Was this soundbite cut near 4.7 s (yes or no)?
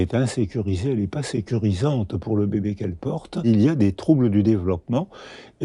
no